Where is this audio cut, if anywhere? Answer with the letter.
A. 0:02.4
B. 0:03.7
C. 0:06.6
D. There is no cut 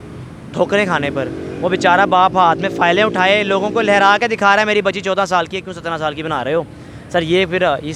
D